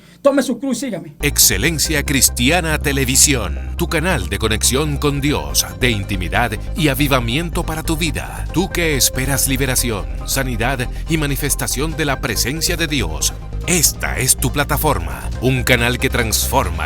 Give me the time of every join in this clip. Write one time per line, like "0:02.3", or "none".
0:01.1